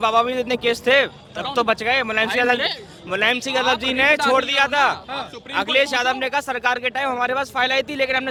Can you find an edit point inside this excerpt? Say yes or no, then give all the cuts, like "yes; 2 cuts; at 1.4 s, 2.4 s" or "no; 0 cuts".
no; 0 cuts